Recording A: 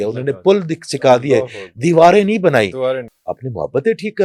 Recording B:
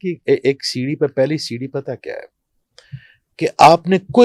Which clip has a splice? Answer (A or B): A